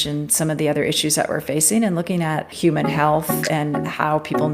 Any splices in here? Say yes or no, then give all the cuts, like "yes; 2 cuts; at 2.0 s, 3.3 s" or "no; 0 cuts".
yes; 1 cut; at 2.5 s